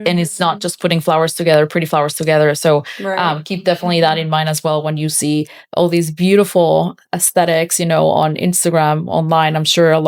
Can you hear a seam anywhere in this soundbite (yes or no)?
no